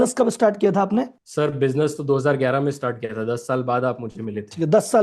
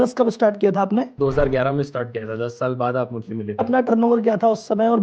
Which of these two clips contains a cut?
second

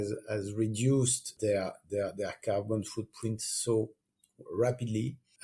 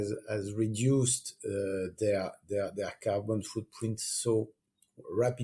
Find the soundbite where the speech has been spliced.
first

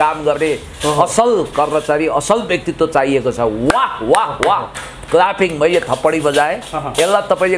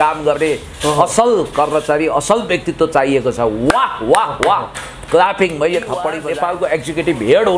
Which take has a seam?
second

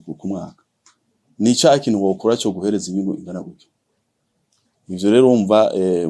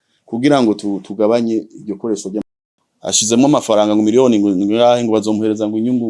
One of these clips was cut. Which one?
second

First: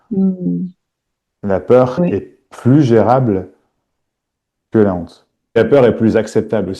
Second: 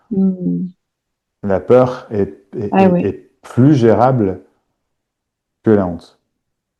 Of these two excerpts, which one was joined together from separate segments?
first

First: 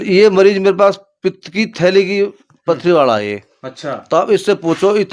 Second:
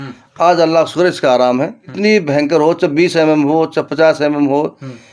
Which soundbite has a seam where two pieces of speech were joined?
second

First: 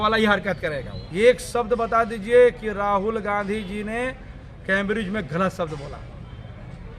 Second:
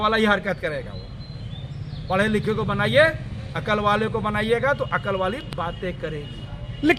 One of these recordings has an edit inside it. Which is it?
first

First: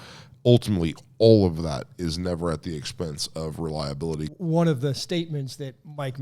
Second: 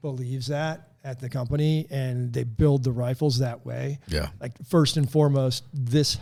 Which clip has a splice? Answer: first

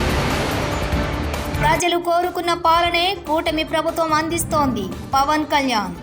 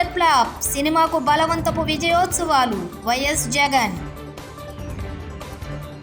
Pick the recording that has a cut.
first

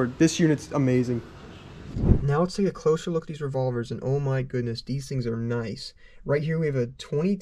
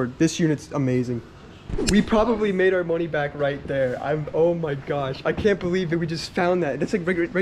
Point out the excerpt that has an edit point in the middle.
second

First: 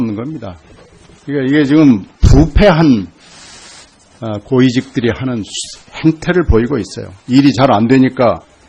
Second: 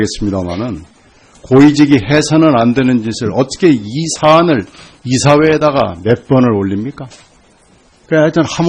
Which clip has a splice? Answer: second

